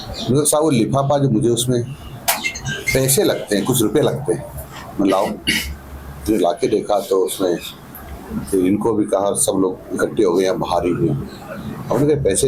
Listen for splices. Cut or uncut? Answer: uncut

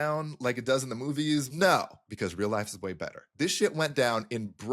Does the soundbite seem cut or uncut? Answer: cut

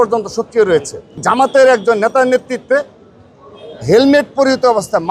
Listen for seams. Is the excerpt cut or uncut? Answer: cut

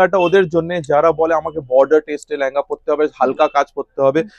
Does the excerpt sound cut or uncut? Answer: uncut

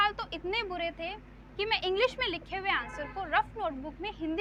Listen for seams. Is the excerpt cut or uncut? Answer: uncut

